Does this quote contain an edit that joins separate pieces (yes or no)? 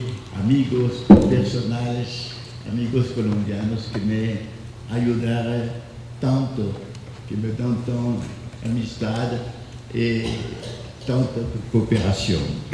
yes